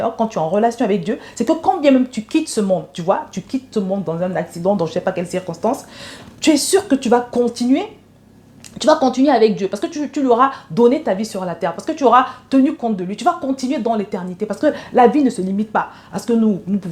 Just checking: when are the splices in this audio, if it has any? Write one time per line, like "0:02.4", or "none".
none